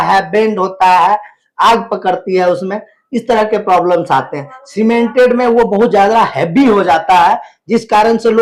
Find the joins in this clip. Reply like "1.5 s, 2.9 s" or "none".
none

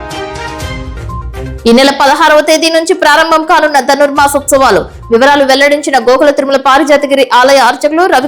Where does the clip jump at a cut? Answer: 1.2 s

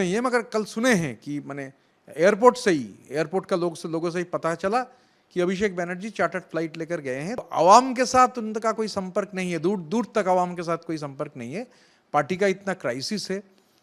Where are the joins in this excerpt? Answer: 7.4 s

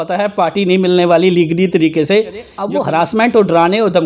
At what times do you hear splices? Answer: 2.6 s

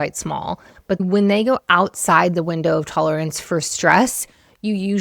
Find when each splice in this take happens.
1.0 s

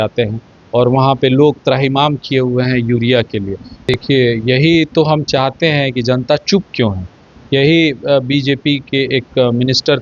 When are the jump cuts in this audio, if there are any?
3.9 s

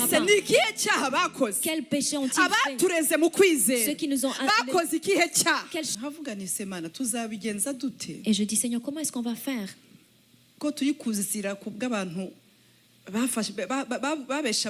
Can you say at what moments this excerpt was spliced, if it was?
5.9 s

